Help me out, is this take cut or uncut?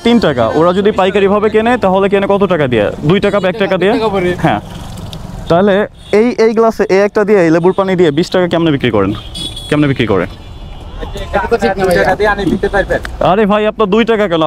uncut